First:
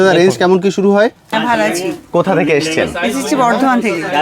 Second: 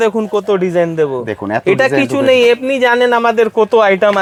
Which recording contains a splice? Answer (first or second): first